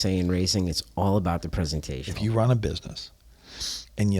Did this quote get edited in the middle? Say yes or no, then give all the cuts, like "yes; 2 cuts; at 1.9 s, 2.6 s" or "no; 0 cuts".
yes; 1 cut; at 2.0 s